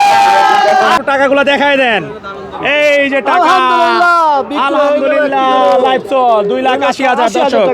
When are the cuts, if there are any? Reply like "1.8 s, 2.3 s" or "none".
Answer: 1.0 s